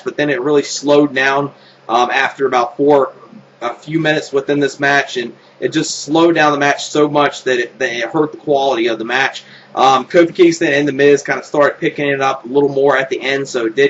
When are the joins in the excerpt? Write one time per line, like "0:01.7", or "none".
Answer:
none